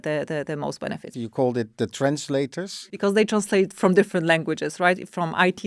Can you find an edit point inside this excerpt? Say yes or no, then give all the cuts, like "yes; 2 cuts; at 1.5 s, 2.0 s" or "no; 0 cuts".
yes; 2 cuts; at 1.1 s, 2.8 s